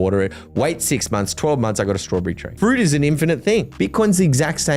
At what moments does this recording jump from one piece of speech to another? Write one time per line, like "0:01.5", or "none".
0:02.4
0:03.7

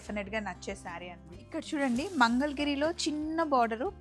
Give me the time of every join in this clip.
0:01.3

